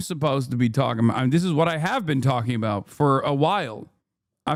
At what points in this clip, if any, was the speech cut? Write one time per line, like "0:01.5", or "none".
none